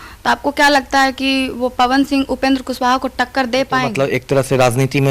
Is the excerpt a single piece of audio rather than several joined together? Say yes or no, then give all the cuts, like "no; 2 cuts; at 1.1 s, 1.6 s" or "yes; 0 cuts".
no; 1 cut; at 3.9 s